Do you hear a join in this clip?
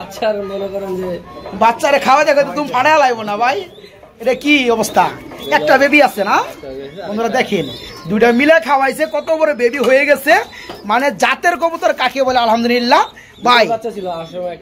no; 0 cuts

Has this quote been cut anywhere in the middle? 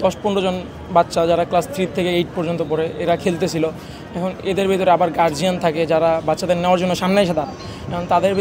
no; 0 cuts

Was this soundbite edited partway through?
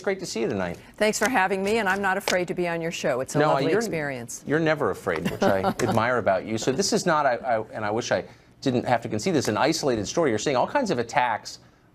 no; 0 cuts

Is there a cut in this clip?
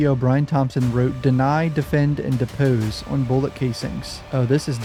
no; 0 cuts

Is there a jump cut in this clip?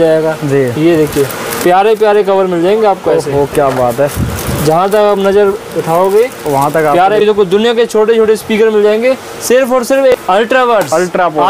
yes; 2 cuts; at 7.2 s, 10.1 s

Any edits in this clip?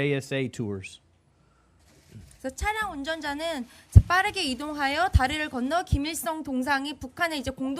yes; 1 cut; at 4.4 s

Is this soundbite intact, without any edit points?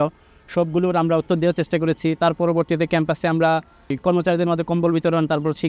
yes; 0 cuts

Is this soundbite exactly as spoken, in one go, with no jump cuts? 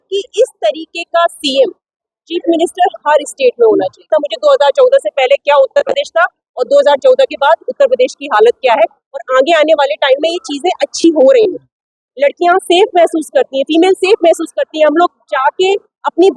no; 1 cut; at 4.1 s

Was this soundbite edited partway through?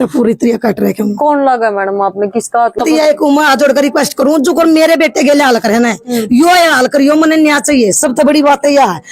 yes; 1 cut; at 2.8 s

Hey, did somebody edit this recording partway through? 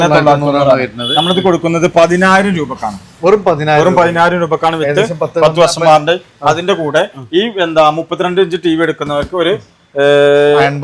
no; 0 cuts

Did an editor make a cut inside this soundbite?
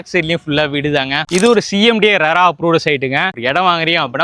yes; 2 cuts; at 1.2 s, 3.3 s

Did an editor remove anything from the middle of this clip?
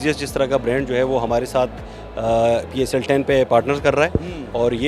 no; 0 cuts

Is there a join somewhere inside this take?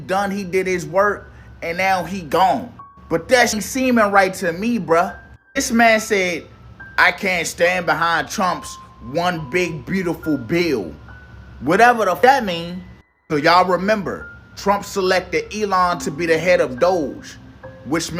yes; 2 cuts; at 3.5 s, 12.2 s

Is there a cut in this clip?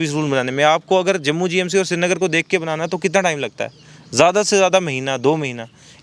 no; 0 cuts

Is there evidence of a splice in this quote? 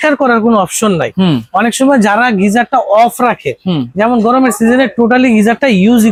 no; 0 cuts

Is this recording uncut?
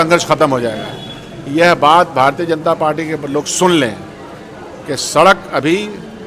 yes; 0 cuts

